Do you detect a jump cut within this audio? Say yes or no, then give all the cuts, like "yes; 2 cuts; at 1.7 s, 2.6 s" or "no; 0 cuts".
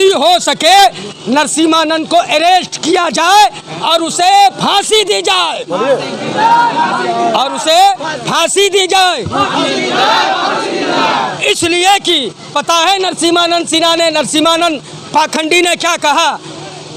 no; 0 cuts